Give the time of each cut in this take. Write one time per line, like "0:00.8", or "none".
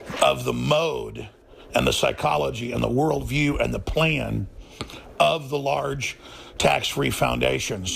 none

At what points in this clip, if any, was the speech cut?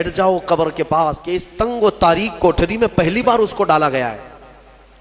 0:01.3

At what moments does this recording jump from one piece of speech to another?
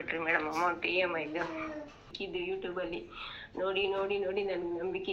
0:02.1

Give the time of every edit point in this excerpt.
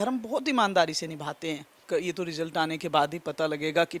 0:01.8

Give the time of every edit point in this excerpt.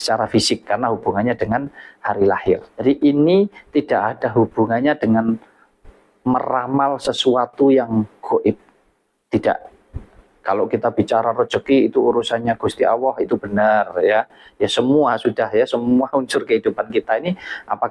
0:02.7

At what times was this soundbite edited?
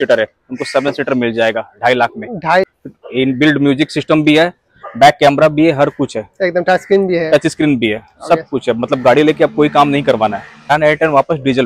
0:02.7
0:10.7

